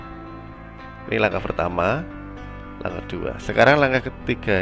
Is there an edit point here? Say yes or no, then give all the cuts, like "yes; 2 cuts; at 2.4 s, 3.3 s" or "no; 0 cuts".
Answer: no; 0 cuts